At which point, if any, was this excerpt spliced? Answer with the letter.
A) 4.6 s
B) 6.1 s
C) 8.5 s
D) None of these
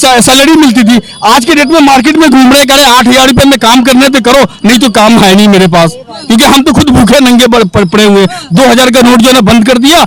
D